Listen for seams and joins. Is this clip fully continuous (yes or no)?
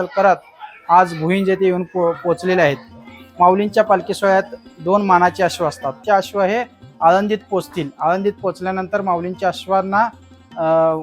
no